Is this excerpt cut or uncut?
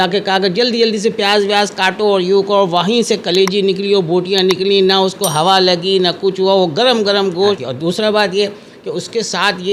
cut